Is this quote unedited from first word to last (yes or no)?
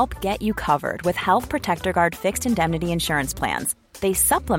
yes